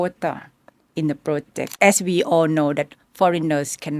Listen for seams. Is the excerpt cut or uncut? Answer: cut